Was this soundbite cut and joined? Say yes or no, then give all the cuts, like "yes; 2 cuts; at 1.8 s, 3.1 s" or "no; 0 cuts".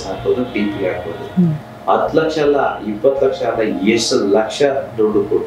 yes; 1 cut; at 1.6 s